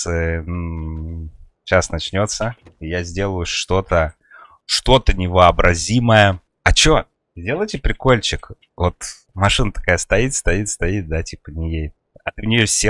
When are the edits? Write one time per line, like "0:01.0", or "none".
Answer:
none